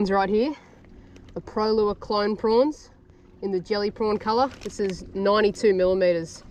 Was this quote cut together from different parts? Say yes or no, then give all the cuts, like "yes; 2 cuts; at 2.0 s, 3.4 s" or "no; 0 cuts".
no; 0 cuts